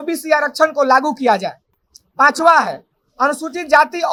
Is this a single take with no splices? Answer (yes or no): yes